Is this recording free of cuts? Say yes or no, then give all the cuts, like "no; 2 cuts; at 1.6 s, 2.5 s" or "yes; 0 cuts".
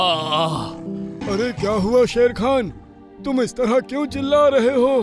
no; 1 cut; at 1.2 s